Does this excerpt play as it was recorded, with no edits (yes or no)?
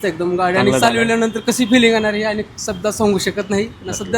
yes